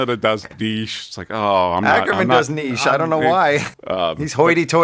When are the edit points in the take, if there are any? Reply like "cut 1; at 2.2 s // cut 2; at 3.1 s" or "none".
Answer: cut 1; at 3.7 s